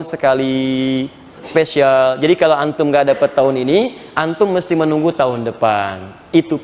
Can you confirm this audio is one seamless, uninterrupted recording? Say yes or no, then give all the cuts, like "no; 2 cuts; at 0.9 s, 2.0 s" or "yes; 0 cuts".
yes; 0 cuts